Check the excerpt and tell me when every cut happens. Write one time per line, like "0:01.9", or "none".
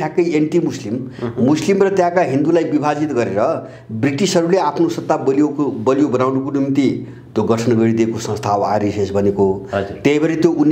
none

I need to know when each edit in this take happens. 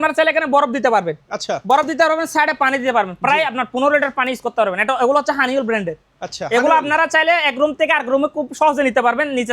none

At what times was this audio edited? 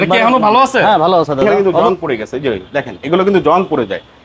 0:01.4

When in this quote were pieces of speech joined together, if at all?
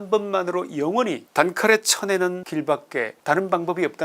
0:01.2
0:02.9

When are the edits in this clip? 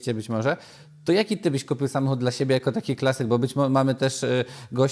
none

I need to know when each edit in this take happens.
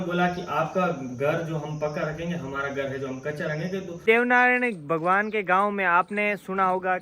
0:04.0

